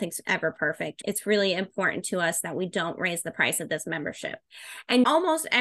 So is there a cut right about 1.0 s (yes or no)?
yes